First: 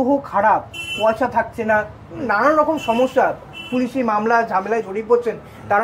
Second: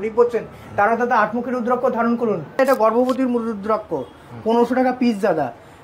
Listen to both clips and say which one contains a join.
second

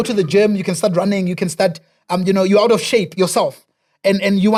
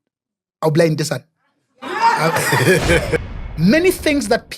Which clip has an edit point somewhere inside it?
second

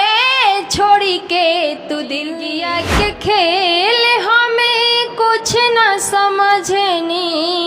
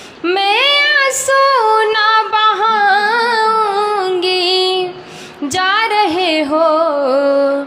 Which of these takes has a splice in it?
first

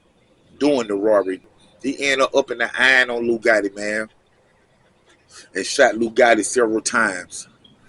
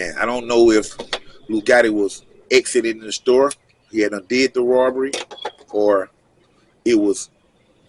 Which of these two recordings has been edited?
first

